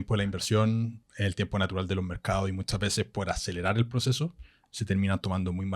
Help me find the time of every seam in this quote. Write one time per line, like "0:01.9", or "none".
0:01.0